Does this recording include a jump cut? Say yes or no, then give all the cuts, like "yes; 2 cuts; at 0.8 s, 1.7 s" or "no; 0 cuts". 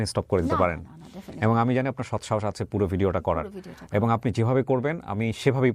no; 0 cuts